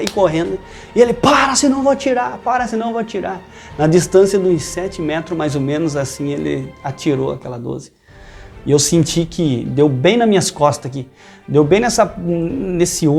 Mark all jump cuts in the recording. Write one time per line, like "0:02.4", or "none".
none